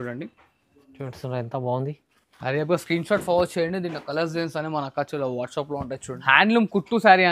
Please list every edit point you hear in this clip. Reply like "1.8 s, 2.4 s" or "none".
6.1 s